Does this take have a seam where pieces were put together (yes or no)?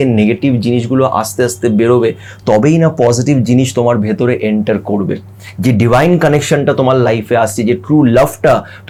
no